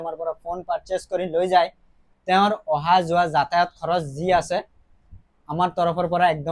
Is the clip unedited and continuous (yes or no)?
yes